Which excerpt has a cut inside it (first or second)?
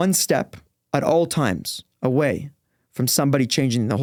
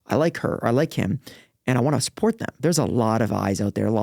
second